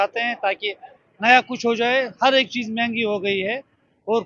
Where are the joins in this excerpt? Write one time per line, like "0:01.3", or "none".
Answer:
none

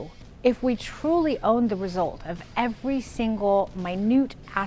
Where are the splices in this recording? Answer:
none

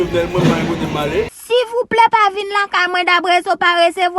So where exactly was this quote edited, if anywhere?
0:01.4

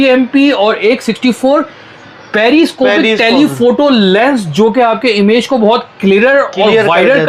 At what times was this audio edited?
none

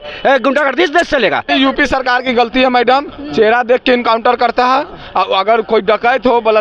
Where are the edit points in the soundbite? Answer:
0:01.5

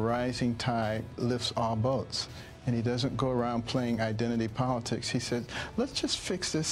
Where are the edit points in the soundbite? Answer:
none

